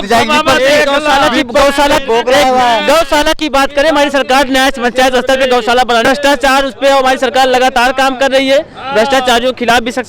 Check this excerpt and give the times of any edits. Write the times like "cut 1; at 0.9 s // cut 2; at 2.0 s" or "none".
cut 1; at 6.0 s